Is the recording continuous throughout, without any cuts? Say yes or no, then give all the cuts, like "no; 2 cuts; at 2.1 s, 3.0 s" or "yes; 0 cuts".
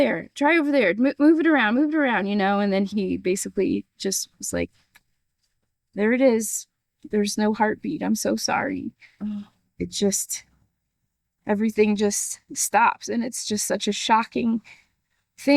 no; 2 cuts; at 2.9 s, 9.6 s